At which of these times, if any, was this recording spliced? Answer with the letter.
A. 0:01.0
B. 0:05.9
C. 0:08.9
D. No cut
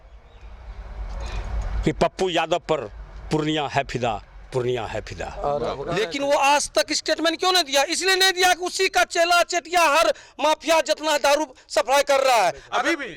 B